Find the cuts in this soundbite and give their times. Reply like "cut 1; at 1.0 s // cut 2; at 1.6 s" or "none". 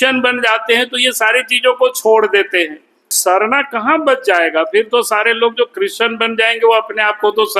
cut 1; at 3.1 s

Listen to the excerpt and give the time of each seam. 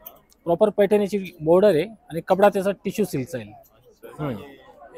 cut 1; at 4.0 s

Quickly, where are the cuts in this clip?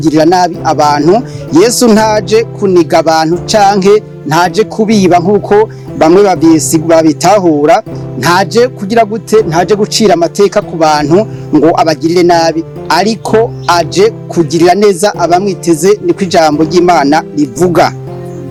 none

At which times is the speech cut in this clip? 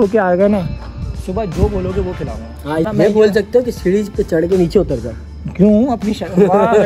cut 1; at 2.9 s

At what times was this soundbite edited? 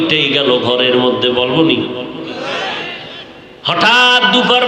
cut 1; at 3.2 s

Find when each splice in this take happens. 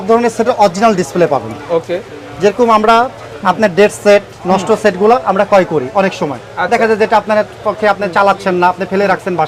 none

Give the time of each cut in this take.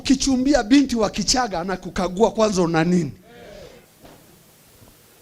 cut 1; at 3.9 s

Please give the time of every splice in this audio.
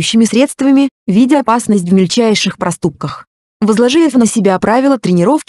cut 1; at 1.0 s

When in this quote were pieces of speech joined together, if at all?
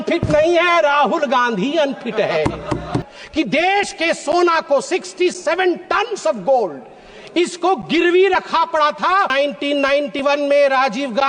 cut 1; at 3.0 s // cut 2; at 9.3 s

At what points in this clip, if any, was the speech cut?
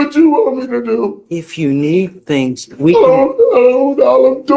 none

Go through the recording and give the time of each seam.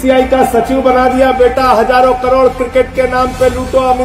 none

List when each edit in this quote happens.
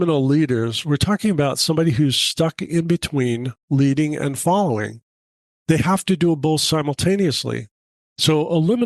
none

